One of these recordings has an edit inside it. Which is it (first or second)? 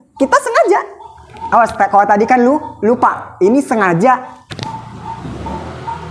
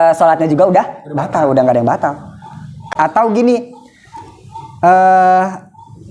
second